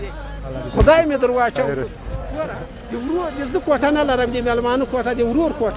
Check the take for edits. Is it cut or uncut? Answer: uncut